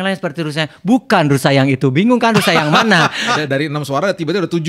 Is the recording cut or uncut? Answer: cut